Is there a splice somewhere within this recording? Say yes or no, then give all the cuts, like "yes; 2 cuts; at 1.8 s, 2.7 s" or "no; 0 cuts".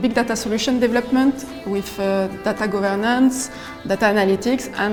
no; 0 cuts